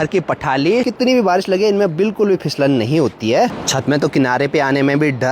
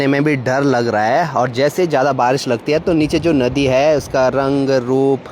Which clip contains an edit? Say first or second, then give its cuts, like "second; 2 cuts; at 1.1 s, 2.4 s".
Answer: first; 2 cuts; at 0.9 s, 3.6 s